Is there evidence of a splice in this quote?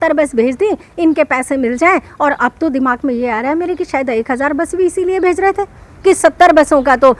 no; 0 cuts

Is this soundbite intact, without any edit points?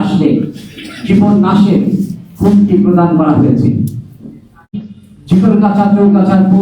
no; 1 cut; at 4.8 s

